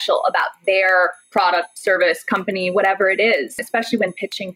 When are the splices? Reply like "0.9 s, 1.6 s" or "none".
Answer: 3.6 s